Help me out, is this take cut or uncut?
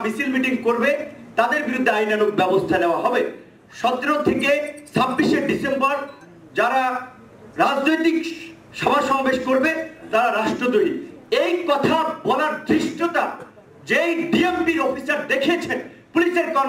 uncut